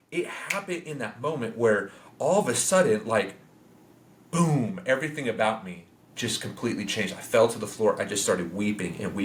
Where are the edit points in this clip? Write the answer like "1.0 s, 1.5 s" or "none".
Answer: none